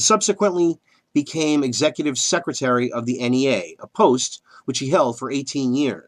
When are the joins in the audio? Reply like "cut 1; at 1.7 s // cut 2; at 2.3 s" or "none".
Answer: cut 1; at 2.5 s

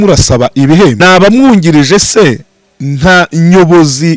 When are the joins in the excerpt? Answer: cut 1; at 1.0 s

